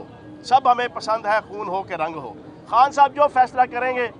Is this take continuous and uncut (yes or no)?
yes